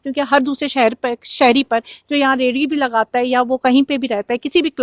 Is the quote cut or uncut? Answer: uncut